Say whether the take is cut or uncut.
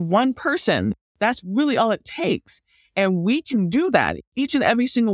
cut